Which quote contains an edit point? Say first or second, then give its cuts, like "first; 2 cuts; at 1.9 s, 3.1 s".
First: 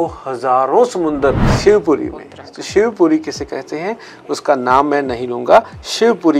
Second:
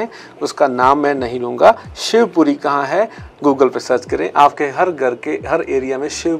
first; 1 cut; at 1.5 s